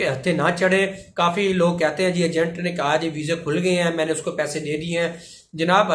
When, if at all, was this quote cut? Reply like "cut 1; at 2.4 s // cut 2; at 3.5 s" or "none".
none